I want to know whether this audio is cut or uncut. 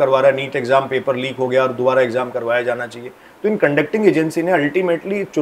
uncut